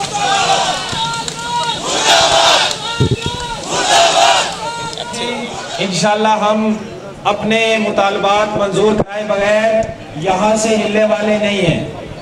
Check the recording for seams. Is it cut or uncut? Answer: uncut